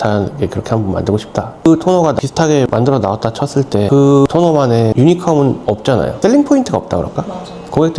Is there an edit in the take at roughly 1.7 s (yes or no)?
yes